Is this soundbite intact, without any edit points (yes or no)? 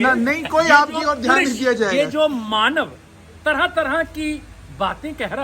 yes